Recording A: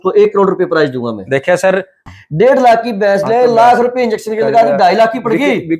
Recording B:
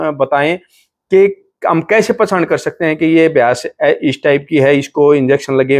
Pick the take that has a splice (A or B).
A